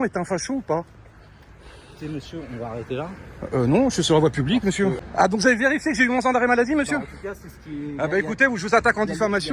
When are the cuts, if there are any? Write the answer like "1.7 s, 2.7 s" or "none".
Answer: 5.0 s